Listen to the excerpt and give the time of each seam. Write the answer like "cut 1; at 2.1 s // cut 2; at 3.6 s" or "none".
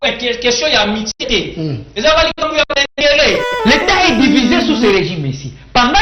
cut 1; at 3.5 s

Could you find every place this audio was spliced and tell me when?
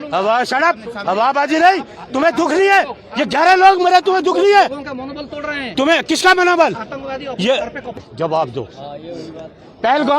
cut 1; at 8.0 s

